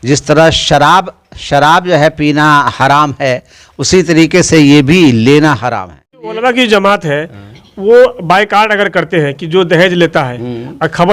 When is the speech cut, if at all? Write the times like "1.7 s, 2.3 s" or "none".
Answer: 6.4 s